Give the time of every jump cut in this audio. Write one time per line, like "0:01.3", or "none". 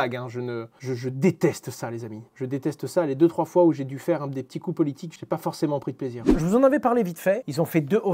none